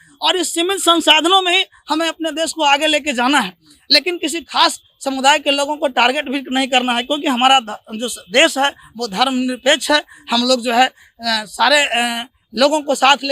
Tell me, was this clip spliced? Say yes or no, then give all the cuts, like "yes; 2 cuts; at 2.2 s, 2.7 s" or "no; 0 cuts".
no; 0 cuts